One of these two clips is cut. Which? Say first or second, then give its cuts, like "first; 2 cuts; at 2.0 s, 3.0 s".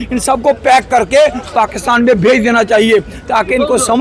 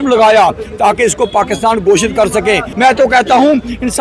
second; 1 cut; at 2.7 s